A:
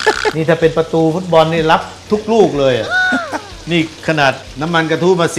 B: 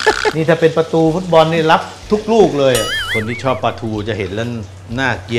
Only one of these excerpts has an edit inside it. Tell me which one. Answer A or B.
B